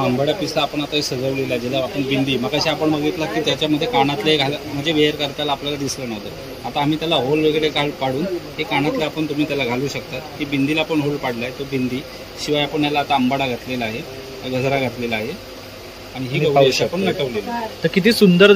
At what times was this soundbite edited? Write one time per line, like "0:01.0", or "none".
none